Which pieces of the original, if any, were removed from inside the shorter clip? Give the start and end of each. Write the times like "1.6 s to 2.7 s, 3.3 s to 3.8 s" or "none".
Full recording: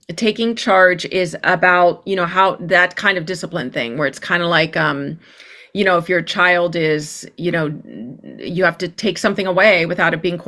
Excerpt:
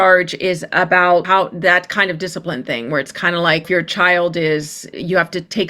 2.0 s to 2.3 s, 4.7 s to 6.0 s, 7.2 s to 8.3 s

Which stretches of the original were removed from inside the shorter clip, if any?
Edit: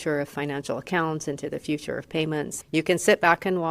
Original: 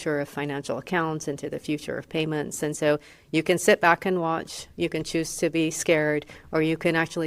2.5 s to 3.1 s

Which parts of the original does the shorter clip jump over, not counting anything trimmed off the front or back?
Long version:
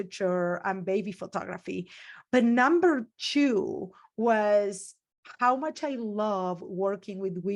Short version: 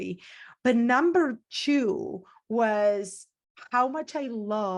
none

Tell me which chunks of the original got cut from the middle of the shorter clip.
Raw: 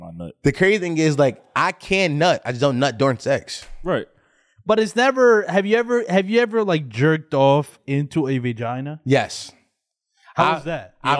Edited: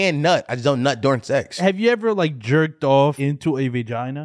3.5 s to 6.1 s, 7.7 s to 7.9 s

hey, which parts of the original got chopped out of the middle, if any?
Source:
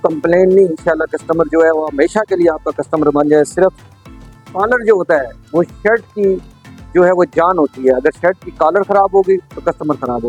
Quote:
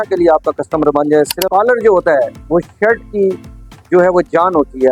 3.6 s to 4.4 s

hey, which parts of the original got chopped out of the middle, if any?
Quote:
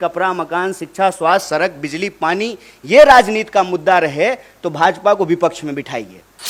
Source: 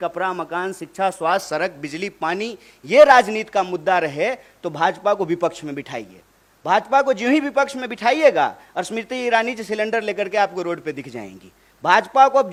none

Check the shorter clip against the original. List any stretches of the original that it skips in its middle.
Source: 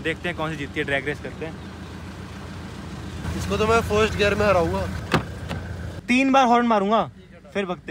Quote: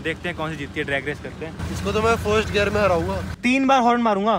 1.6 s to 3.2 s, 4.9 s to 5.9 s

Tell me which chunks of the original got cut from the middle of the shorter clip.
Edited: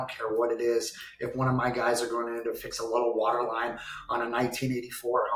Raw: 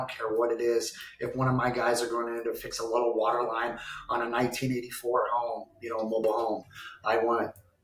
none

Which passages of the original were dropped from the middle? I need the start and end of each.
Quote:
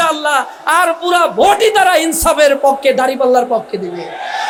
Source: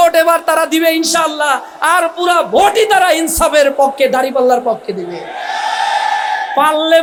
none

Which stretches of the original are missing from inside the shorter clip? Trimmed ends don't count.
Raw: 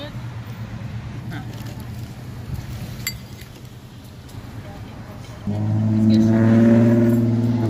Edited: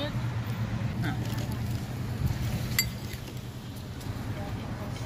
0.9 s to 1.2 s

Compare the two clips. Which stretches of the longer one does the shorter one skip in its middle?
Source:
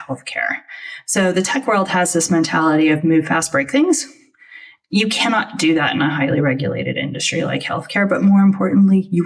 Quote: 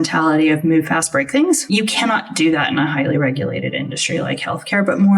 4.0 s to 4.9 s

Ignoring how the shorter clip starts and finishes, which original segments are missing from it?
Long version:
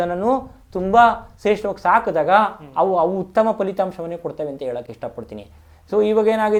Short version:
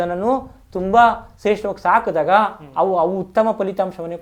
none

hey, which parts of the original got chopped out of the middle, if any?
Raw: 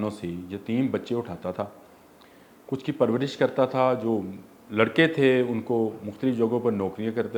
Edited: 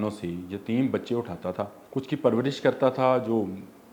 1.8 s to 2.6 s

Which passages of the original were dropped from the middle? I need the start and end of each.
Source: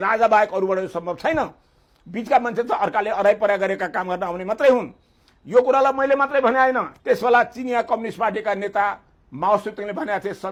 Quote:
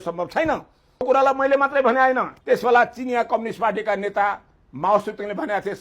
1.9 s to 5.6 s

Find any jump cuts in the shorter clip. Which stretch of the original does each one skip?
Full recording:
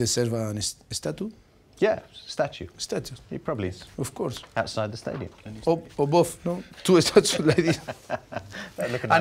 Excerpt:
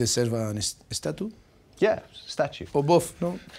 2.6 s to 5.9 s

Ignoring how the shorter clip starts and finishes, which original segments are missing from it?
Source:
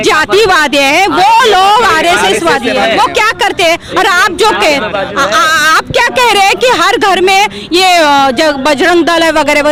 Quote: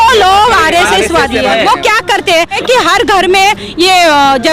3.9 s to 6.5 s

